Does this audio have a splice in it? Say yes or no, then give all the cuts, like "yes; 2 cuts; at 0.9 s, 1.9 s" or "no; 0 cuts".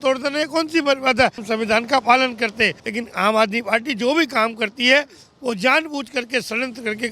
yes; 2 cuts; at 1.4 s, 2.8 s